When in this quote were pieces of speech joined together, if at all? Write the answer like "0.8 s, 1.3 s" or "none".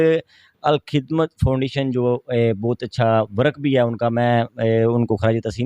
none